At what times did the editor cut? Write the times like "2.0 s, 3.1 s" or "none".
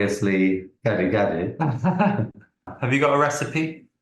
2.2 s